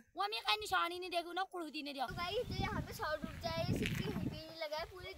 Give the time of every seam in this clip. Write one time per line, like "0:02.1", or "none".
0:02.1